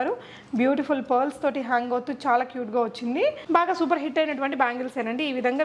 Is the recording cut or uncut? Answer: cut